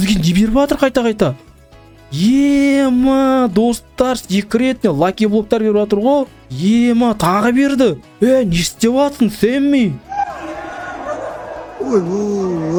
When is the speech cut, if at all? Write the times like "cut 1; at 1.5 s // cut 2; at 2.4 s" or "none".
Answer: none